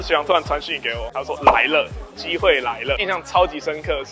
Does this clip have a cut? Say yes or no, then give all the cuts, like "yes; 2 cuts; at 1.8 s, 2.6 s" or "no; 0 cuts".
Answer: yes; 1 cut; at 3.0 s